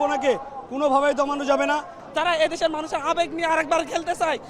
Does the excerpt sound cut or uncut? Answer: cut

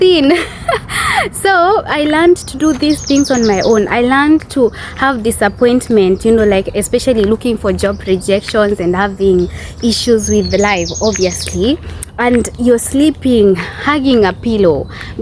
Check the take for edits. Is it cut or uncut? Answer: uncut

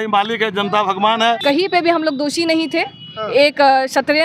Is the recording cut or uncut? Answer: cut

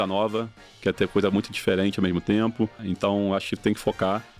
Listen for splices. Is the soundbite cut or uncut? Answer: cut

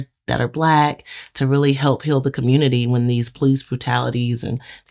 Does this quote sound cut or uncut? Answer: uncut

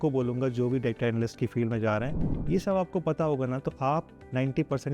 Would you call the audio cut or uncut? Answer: cut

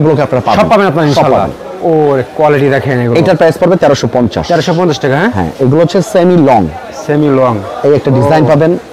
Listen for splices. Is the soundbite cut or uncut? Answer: uncut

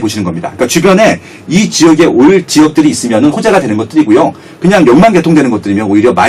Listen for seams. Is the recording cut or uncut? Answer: uncut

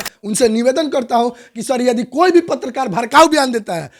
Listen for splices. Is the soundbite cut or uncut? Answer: uncut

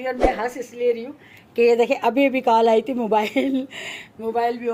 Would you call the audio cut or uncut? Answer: uncut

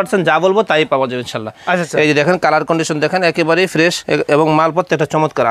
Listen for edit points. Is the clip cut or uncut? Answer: uncut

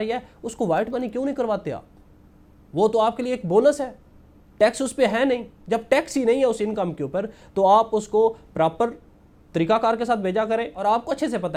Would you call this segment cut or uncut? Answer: uncut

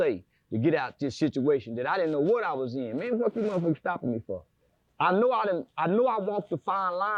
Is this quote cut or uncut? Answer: uncut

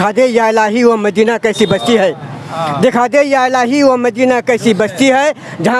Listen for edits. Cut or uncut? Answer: uncut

